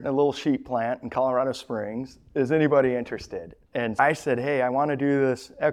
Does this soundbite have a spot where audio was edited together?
yes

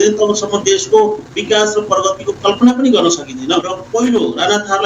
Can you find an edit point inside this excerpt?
yes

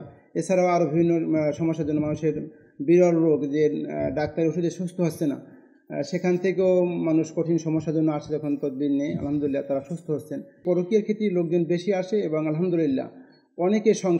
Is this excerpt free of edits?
no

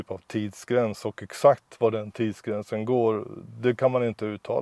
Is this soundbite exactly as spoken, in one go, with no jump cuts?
yes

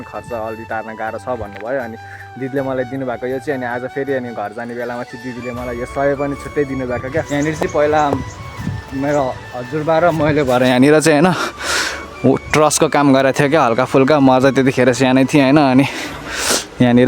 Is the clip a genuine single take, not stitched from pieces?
no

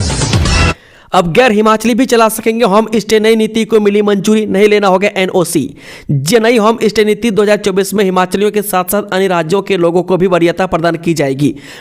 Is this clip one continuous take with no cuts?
no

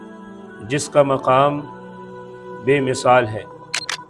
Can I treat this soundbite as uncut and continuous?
yes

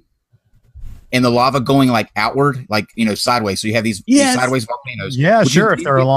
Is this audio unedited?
yes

